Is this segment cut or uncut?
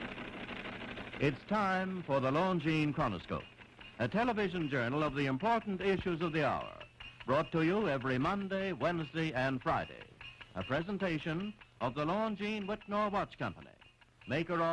cut